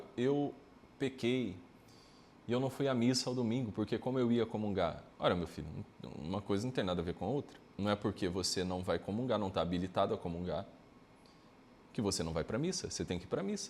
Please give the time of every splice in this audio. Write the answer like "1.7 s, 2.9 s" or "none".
5.1 s, 7.6 s